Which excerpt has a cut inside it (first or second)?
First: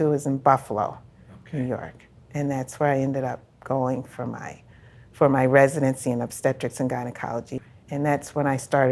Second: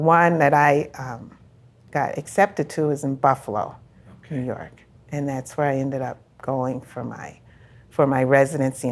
first